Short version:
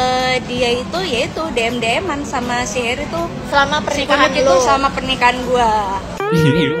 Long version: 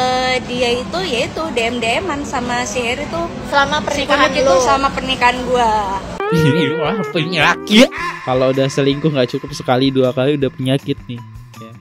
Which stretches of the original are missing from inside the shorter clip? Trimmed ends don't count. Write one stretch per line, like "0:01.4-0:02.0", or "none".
none